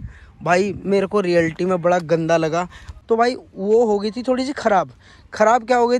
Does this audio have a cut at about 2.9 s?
yes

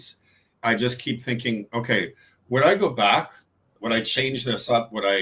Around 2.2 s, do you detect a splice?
no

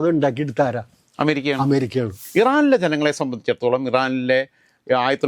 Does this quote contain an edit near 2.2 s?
yes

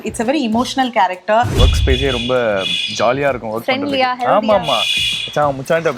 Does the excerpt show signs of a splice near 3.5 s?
no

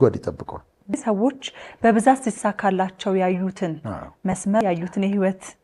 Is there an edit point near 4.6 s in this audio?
yes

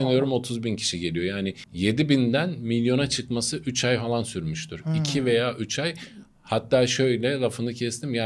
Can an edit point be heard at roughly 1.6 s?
no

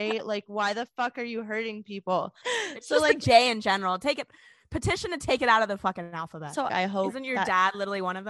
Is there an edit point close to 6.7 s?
yes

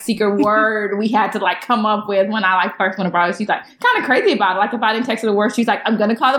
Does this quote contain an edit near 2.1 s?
no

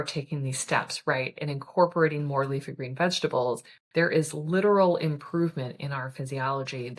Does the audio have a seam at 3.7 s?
no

